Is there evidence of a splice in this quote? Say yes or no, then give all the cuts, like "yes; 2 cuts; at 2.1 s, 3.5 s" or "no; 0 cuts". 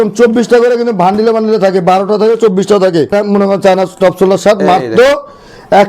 yes; 1 cut; at 3.1 s